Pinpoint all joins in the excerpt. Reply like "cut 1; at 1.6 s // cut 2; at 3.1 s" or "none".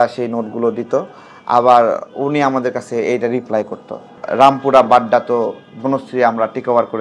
cut 1; at 4.1 s

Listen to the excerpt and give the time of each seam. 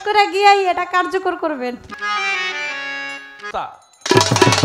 cut 1; at 1.9 s // cut 2; at 3.4 s

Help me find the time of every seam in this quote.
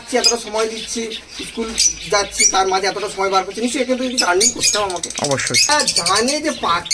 cut 1; at 5.7 s

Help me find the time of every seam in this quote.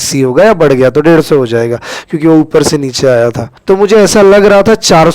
cut 1; at 3.5 s

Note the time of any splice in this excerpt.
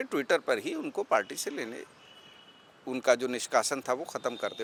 none

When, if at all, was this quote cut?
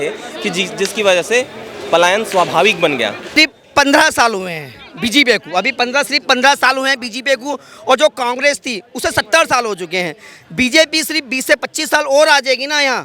cut 1; at 3.3 s

